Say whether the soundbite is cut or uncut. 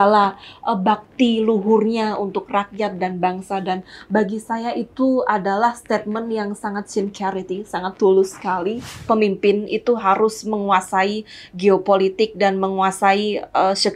cut